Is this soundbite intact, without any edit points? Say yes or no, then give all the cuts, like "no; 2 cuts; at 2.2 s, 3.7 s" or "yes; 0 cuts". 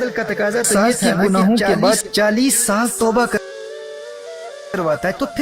yes; 0 cuts